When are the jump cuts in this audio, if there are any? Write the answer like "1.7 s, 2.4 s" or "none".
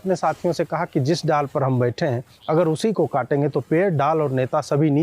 none